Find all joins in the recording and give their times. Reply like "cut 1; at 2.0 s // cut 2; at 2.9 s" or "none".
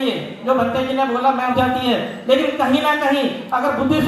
cut 1; at 1.5 s